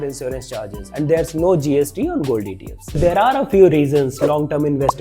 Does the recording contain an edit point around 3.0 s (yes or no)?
yes